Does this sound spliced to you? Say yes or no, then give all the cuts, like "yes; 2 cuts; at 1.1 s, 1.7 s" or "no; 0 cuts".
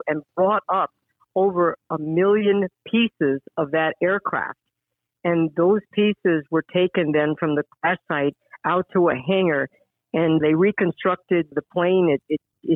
yes; 1 cut; at 9.8 s